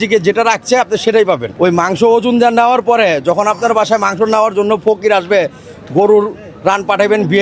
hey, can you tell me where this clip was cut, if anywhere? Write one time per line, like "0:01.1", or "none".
0:01.5